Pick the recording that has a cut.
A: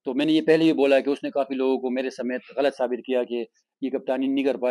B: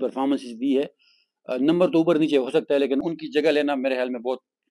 B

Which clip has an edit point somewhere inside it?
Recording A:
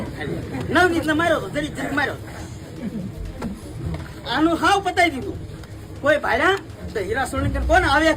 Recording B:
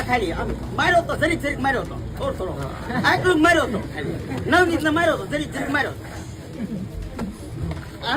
A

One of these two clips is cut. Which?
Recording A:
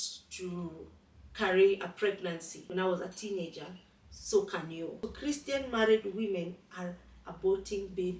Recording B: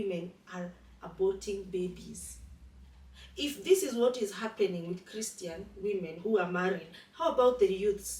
A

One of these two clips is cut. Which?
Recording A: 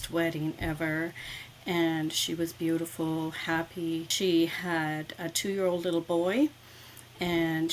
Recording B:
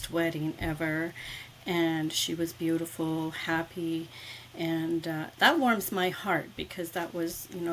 A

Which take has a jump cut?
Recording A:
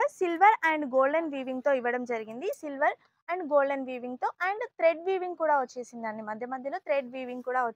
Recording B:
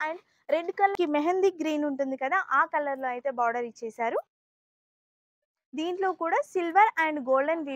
B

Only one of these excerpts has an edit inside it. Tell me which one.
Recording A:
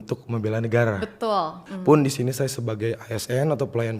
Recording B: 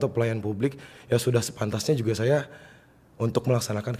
A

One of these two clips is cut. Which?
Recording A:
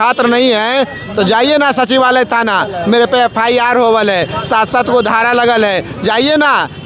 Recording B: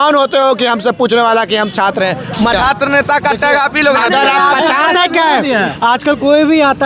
B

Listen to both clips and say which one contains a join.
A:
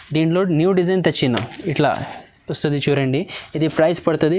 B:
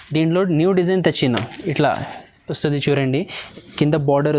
B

